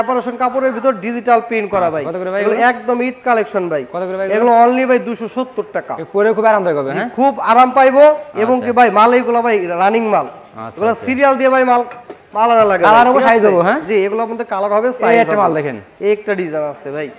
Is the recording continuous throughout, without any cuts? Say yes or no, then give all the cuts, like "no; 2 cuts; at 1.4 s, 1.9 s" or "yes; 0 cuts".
yes; 0 cuts